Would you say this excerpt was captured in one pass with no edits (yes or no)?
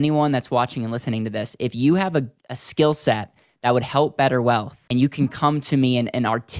no